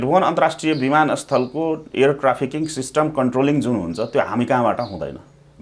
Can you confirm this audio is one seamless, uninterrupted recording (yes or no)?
yes